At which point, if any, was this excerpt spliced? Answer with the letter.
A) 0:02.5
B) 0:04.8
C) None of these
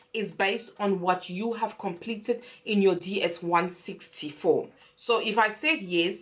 B